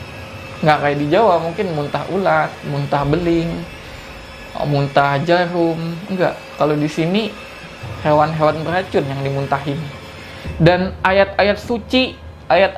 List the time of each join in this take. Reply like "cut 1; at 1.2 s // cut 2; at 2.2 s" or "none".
cut 1; at 10.0 s